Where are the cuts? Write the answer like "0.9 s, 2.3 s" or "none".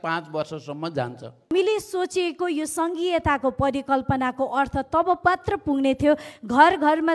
1.5 s